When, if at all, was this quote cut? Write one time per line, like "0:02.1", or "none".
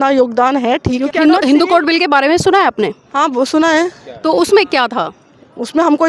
0:01.0